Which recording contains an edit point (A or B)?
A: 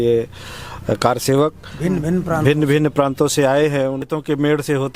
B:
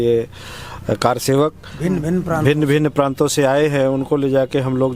A